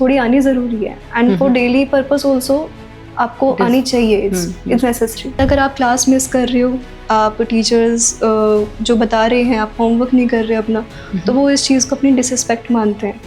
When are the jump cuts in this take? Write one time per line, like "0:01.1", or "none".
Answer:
0:05.4